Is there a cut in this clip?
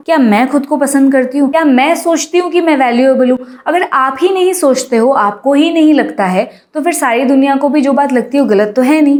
no; 0 cuts

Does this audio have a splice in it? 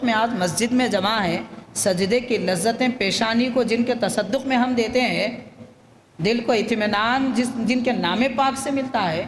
no; 0 cuts

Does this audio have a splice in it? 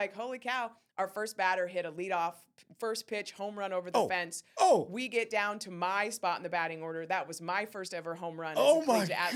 no; 0 cuts

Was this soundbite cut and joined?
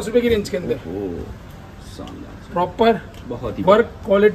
no; 0 cuts

